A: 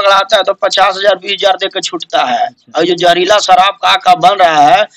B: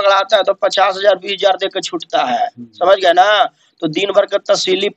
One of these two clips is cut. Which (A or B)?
A